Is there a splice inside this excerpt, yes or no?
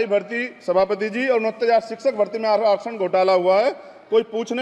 no